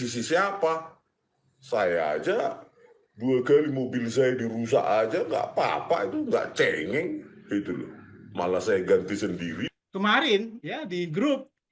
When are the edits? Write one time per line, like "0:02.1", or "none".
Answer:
0:09.7